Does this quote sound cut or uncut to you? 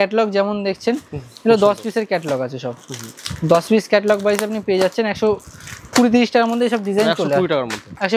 uncut